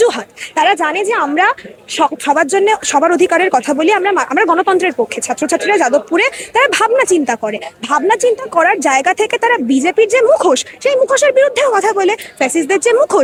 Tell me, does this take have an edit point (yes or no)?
no